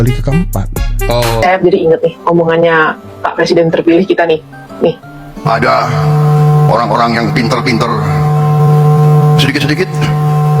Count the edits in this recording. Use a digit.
1